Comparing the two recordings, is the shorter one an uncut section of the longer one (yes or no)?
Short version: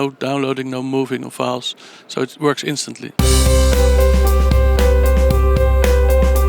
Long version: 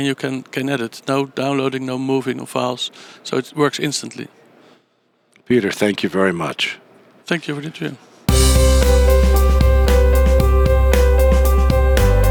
no